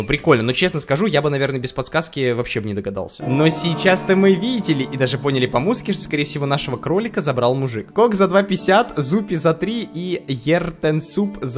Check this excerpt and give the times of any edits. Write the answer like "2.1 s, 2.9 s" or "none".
3.2 s, 7.8 s